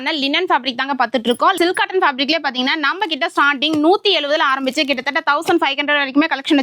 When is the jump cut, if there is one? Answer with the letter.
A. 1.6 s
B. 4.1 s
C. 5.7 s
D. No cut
A